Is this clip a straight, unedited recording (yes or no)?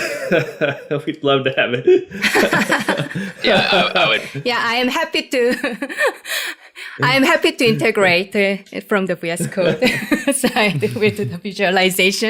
yes